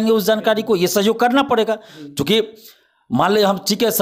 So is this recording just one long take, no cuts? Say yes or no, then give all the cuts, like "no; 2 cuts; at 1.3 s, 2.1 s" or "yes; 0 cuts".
yes; 0 cuts